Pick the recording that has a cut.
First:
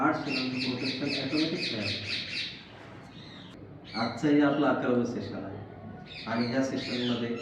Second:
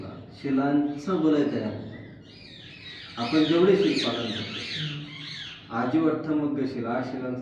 first; 1 cut; at 3.5 s

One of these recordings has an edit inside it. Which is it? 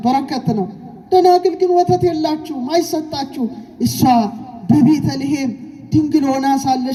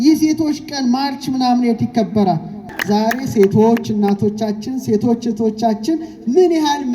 second; 1 cut; at 2.6 s

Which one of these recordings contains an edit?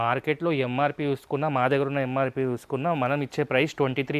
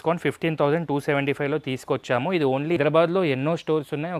second; 1 cut; at 2.8 s

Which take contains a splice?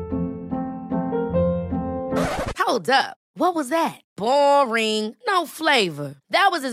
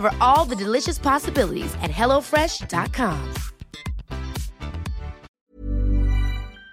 second; 1 cut; at 5.4 s

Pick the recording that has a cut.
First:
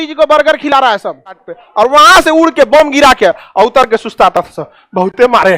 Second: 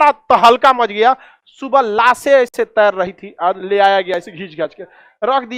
first; 1 cut; at 1.5 s

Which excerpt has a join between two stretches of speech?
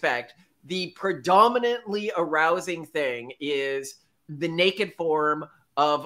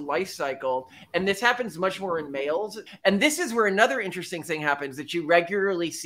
second; 1 cut; at 2.8 s

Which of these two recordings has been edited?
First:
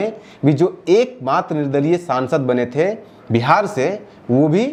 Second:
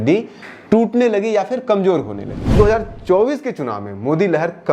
second; 1 cut; at 2.5 s

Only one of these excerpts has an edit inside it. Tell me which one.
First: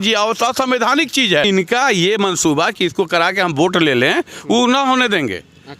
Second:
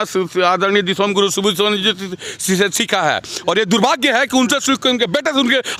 first; 1 cut; at 1.5 s

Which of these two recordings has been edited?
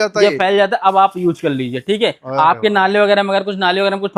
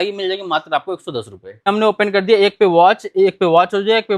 second; 1 cut; at 1.7 s

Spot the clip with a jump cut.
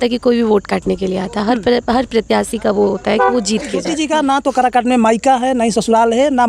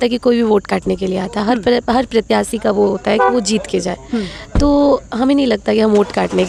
first; 1 cut; at 3.9 s

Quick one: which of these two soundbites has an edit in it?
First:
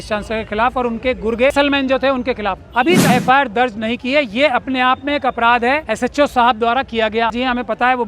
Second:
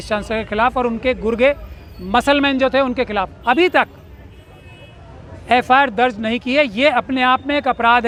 first; 4 cuts; at 1.5 s, 3.0 s, 5.9 s, 7.3 s

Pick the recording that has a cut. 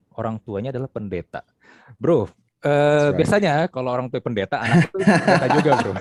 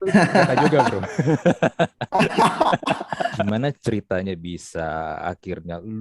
second; 1 cut; at 3.4 s

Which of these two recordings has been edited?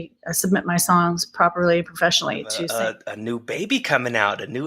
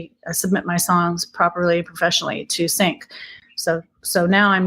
first; 1 cut; at 2.5 s

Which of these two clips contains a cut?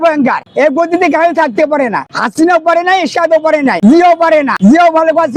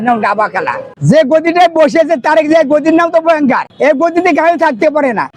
second; 1 cut; at 1.0 s

